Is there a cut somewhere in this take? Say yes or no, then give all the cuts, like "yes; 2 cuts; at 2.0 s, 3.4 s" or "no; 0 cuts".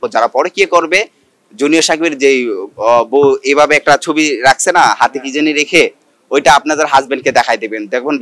no; 0 cuts